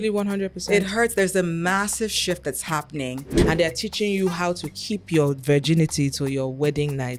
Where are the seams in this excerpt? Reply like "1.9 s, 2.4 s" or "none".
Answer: 3.3 s